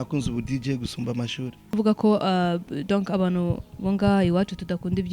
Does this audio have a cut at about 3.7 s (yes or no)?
no